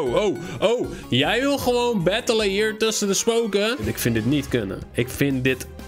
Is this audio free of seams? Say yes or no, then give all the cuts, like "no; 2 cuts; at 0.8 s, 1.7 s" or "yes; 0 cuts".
no; 1 cut; at 3.8 s